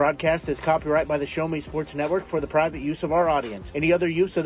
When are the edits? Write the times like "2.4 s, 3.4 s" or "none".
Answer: none